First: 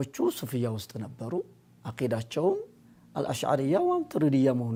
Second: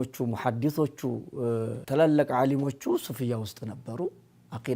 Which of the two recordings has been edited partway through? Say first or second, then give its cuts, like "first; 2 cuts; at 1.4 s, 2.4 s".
second; 1 cut; at 1.8 s